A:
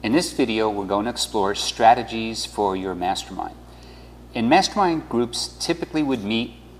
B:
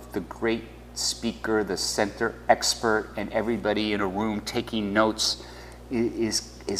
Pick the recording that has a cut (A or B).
B